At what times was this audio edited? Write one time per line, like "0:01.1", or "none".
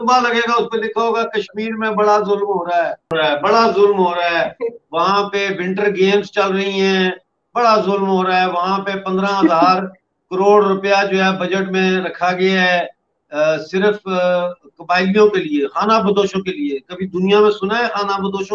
0:03.1